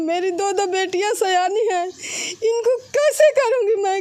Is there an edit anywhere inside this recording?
no; 0 cuts

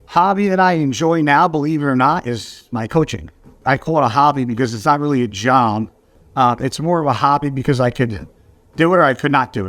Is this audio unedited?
yes; 0 cuts

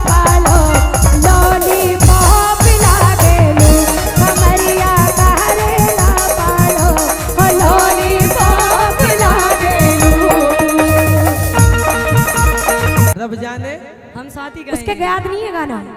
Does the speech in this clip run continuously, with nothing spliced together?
no; 1 cut; at 13.1 s

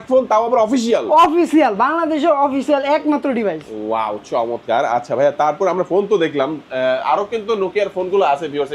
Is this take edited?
no; 0 cuts

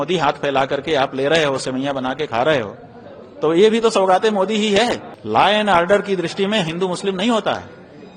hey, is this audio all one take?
no; 1 cut; at 5.1 s

